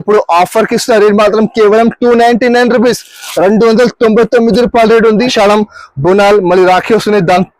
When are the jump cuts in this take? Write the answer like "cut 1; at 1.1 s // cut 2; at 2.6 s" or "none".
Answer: cut 1; at 5.3 s